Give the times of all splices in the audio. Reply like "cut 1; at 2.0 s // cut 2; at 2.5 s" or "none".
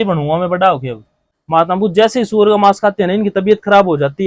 cut 1; at 1.2 s